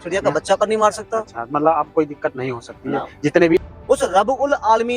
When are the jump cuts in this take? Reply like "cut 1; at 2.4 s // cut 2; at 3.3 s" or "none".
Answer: cut 1; at 3.6 s